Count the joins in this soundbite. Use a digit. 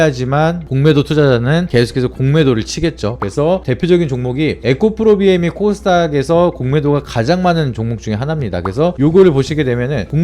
1